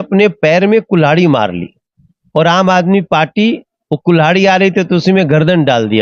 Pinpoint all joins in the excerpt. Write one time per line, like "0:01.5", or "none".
none